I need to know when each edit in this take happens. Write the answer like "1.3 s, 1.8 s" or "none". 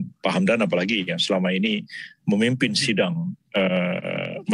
none